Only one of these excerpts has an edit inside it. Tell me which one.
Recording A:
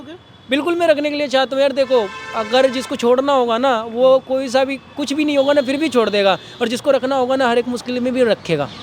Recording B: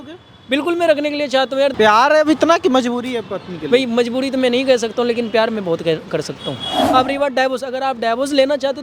B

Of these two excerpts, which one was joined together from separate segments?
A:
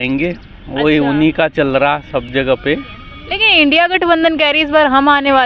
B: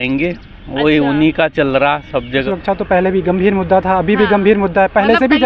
B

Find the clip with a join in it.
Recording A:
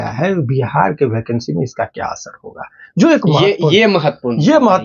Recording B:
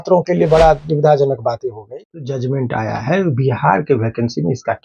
B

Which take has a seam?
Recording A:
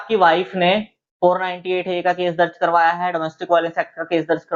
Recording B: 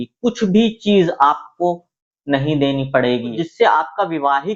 B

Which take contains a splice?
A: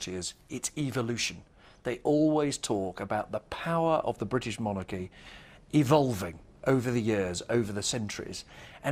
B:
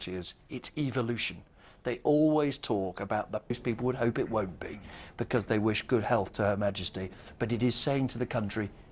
A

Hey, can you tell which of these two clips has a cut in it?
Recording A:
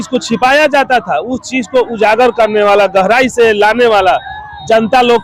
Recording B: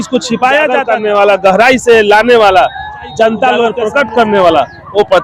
B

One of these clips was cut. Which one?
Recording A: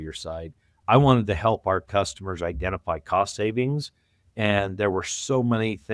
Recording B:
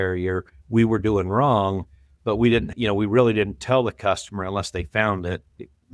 B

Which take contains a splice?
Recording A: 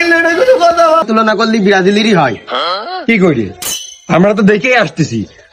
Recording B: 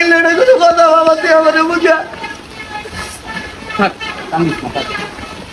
A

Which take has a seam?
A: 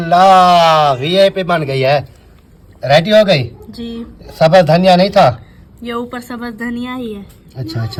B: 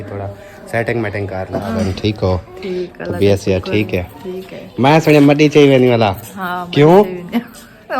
B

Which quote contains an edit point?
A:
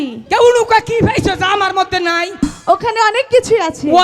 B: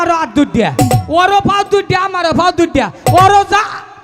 A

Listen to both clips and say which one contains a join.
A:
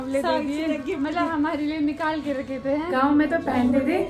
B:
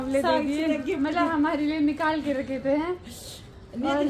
A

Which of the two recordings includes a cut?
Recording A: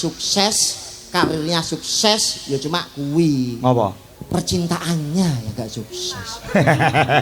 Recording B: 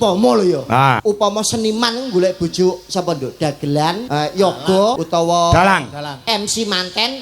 B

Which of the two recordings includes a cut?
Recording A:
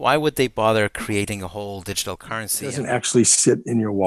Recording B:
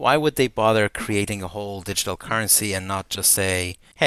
A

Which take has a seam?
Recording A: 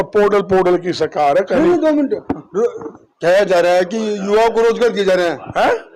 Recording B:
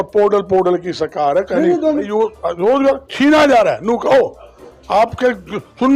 B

